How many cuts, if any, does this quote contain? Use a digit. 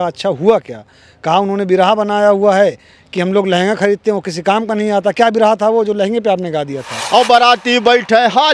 1